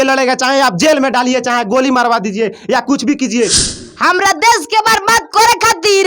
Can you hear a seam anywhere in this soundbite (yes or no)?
yes